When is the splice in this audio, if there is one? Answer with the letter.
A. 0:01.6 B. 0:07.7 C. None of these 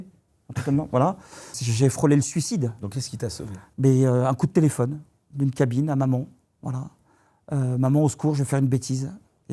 A